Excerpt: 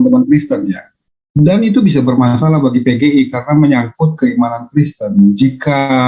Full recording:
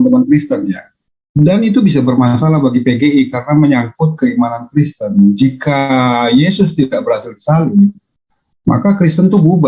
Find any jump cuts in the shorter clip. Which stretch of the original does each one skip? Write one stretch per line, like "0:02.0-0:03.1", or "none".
none